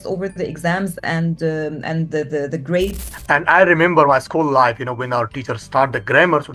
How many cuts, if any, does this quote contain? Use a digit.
1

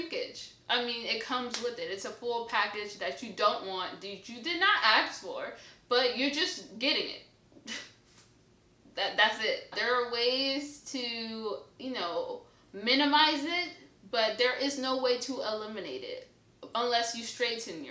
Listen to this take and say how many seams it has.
0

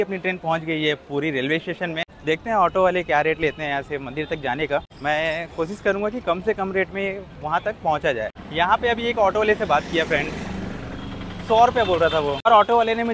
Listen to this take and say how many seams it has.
4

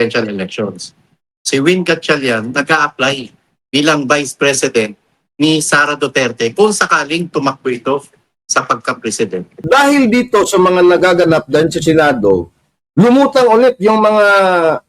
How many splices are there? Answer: 1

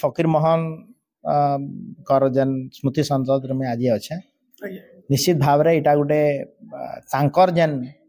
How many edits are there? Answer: 0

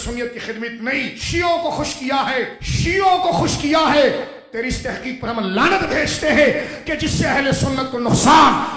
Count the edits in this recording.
2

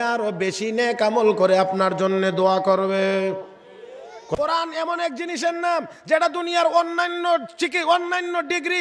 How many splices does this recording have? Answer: 1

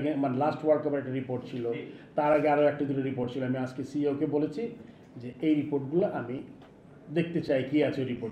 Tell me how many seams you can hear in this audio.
0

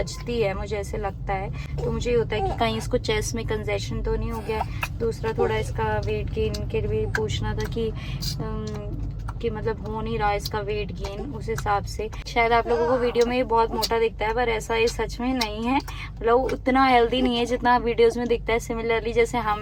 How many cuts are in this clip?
0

